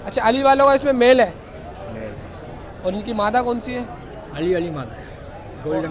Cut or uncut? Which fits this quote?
uncut